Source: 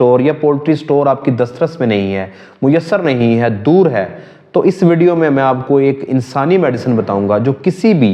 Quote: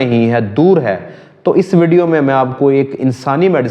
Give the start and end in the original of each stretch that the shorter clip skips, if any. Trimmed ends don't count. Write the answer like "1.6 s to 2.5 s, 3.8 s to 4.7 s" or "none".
none

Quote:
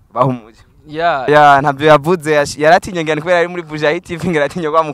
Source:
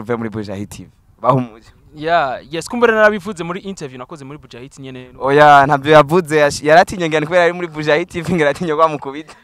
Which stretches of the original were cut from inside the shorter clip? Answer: 2.4 s to 5.3 s

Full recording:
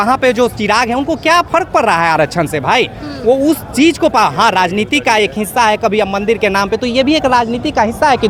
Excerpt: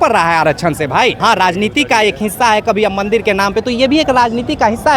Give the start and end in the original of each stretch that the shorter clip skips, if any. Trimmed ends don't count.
2.9 s to 4.3 s

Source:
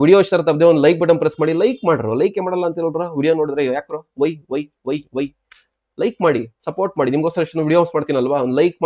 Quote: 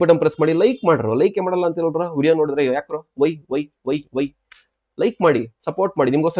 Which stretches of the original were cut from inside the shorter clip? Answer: none

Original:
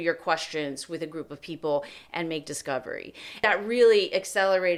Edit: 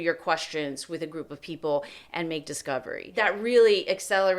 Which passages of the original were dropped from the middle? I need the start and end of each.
3.0 s to 3.3 s

